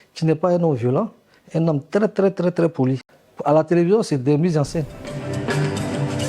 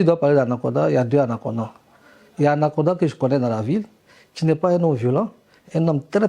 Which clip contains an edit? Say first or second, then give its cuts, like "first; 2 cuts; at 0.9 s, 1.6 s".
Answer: first; 2 cuts; at 3.1 s, 5.3 s